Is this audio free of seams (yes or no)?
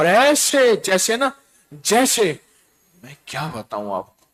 yes